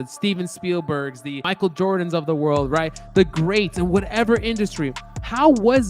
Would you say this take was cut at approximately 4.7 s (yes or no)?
no